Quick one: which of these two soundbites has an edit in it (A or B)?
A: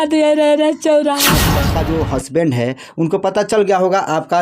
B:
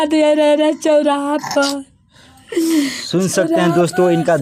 A